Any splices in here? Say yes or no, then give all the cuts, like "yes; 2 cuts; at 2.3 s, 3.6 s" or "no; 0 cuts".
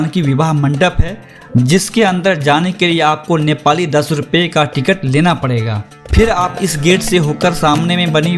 no; 0 cuts